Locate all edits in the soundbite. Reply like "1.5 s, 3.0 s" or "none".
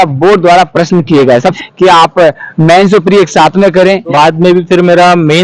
1.5 s, 4.1 s